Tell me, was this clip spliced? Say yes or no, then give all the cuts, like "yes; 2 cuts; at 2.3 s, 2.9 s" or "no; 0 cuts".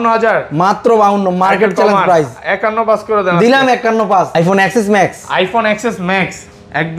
yes; 1 cut; at 4.3 s